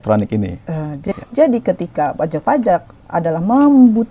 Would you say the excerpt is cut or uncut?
cut